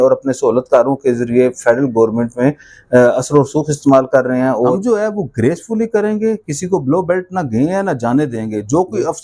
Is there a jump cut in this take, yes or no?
yes